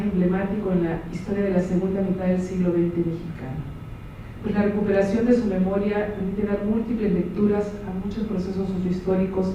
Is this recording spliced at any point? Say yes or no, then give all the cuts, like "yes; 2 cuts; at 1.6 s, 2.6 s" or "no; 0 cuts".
no; 0 cuts